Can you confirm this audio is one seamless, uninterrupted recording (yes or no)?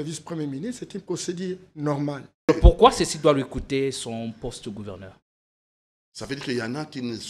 no